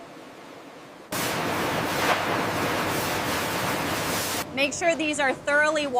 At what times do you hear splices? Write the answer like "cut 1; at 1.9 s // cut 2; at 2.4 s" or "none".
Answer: cut 1; at 1.1 s // cut 2; at 4.4 s

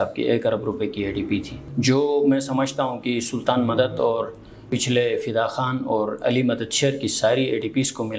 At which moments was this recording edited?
none

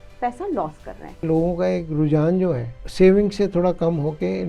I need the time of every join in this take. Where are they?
cut 1; at 1.2 s // cut 2; at 2.8 s

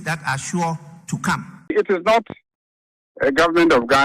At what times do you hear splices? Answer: cut 1; at 1.5 s

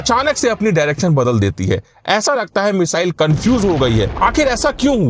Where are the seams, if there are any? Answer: cut 1; at 4.1 s

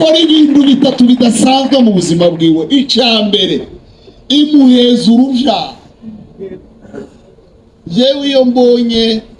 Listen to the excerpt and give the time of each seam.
none

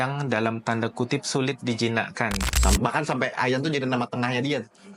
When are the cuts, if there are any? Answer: cut 1; at 2.5 s

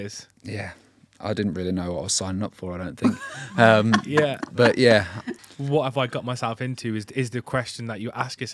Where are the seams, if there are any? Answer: none

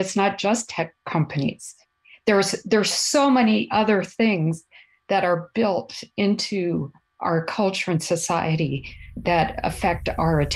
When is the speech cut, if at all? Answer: cut 1; at 9.1 s

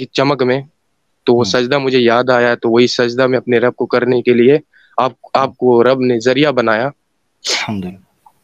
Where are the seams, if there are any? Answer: none

